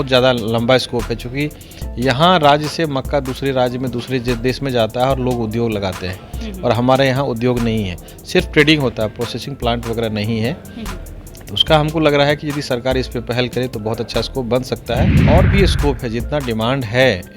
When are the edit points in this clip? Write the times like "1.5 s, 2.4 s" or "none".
15.2 s